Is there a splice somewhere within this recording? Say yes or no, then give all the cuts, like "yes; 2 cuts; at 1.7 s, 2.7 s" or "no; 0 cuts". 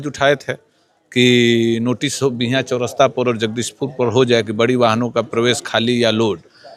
no; 0 cuts